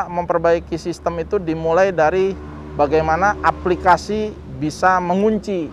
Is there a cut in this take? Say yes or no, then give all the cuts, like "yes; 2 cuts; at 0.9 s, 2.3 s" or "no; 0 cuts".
no; 0 cuts